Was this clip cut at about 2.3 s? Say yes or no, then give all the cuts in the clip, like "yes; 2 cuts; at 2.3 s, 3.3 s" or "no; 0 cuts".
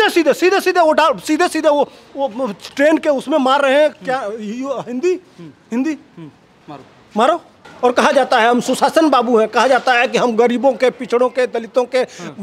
no; 1 cut; at 7.5 s